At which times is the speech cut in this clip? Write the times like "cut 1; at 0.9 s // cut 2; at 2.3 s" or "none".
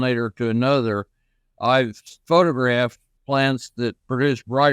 cut 1; at 2.1 s // cut 2; at 3.1 s